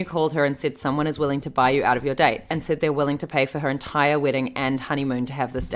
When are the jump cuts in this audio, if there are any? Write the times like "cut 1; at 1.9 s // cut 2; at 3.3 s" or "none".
cut 1; at 2.5 s